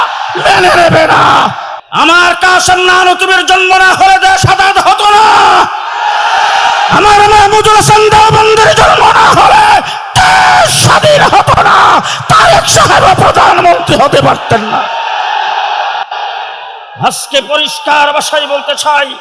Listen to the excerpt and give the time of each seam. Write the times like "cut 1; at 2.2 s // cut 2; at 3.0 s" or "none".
cut 1; at 1.5 s